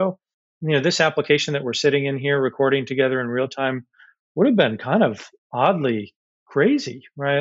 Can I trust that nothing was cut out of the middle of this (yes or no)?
yes